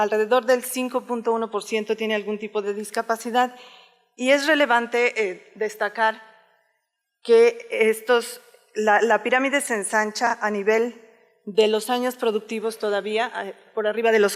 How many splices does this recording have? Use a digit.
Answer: 1